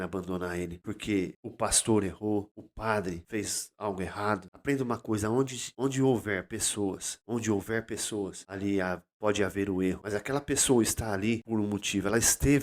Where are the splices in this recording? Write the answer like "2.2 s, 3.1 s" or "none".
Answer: 0.8 s, 1.4 s, 2.9 s, 4.5 s, 5.6 s, 7.1 s, 8.4 s, 10.0 s, 11.4 s